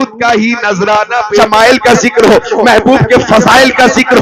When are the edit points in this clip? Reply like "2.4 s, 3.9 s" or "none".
1.4 s